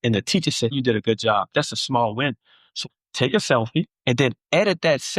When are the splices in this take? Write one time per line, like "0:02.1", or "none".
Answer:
0:00.7
0:02.8